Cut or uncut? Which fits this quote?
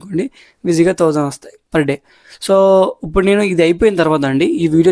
uncut